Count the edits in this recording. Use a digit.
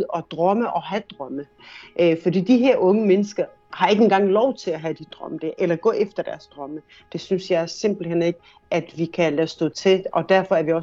1